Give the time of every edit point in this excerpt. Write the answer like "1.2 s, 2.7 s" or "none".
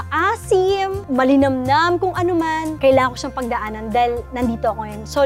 1.0 s, 2.7 s